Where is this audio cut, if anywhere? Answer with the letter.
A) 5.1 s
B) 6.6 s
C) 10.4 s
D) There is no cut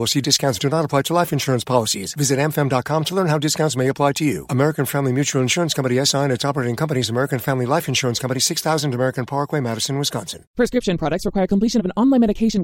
C